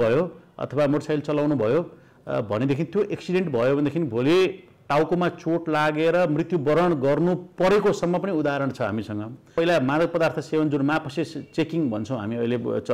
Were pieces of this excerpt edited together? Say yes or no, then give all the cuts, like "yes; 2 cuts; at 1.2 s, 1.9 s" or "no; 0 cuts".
yes; 1 cut; at 9.5 s